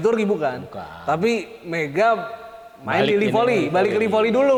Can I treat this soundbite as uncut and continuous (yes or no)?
yes